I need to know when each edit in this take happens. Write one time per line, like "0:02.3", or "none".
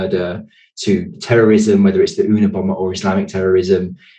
0:01.2

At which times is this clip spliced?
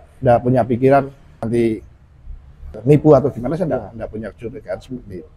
0:01.4
0:02.7

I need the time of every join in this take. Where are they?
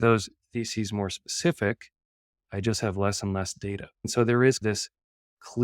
0:04.0

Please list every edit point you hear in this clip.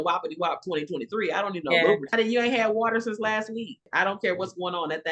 0:02.1
0:03.8

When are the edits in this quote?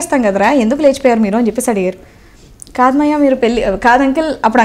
none

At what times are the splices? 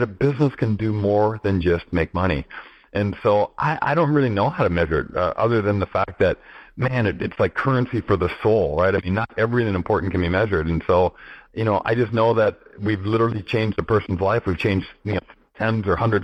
none

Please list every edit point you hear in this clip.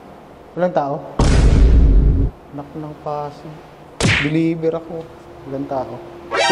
0:01.1
0:02.3

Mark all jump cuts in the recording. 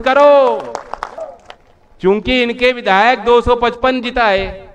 0:01.2

